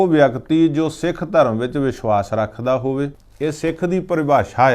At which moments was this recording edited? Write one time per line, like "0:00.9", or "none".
0:03.2